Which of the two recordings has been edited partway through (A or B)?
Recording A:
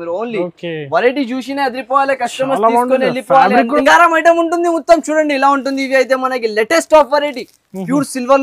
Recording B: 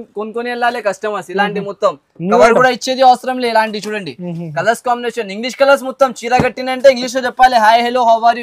A